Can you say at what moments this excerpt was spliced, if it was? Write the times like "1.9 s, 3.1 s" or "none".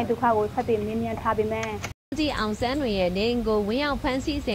2.1 s